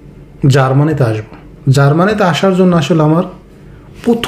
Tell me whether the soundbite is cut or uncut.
uncut